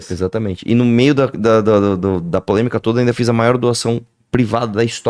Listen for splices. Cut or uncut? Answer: uncut